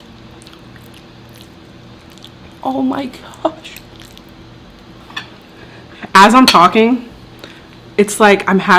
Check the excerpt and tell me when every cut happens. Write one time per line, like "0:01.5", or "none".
0:05.0